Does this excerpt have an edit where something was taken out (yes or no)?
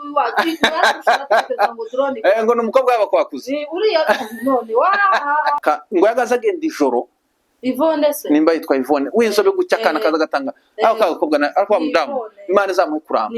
yes